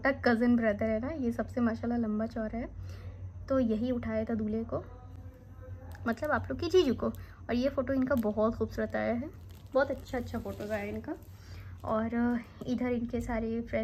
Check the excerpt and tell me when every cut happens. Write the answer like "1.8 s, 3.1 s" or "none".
none